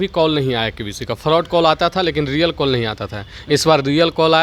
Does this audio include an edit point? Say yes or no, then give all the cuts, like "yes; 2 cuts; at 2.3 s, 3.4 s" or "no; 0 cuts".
no; 0 cuts